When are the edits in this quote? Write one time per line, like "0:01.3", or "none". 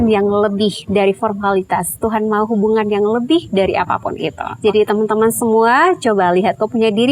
0:04.4